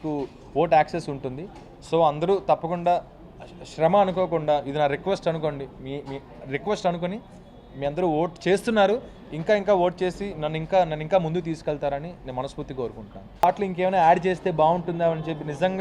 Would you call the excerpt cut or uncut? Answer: cut